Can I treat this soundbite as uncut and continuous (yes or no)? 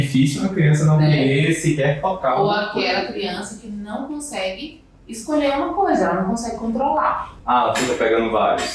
no